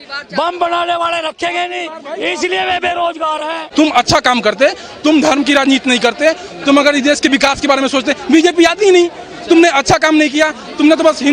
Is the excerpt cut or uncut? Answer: cut